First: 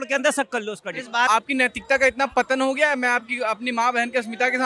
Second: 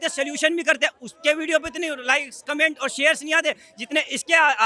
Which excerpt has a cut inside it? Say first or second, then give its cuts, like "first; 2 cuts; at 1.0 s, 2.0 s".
first; 1 cut; at 1.3 s